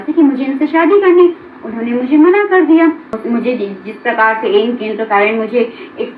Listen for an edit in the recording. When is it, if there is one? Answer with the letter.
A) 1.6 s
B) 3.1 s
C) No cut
B